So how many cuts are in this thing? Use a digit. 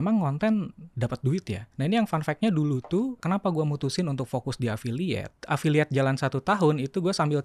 3